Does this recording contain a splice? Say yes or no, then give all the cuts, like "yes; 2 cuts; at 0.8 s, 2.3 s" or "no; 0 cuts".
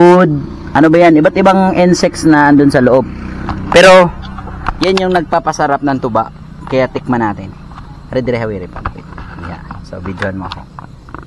no; 0 cuts